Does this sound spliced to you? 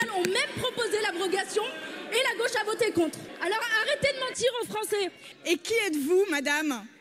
yes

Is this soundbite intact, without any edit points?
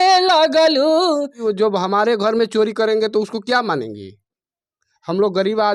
no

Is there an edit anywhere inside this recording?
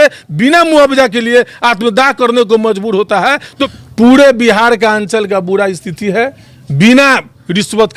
yes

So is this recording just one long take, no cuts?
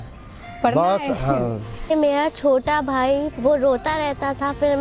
no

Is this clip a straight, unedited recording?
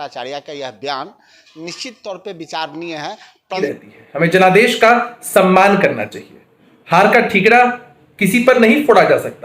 no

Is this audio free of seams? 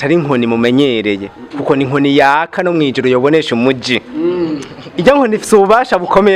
yes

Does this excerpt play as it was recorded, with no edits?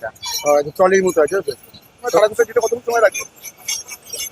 no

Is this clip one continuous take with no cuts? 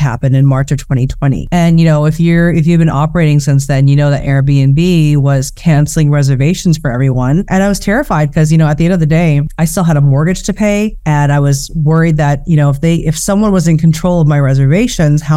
no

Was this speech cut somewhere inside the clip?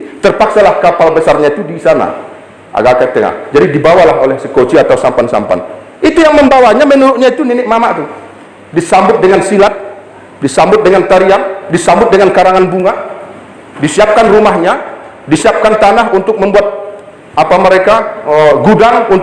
no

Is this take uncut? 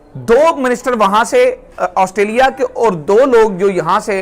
yes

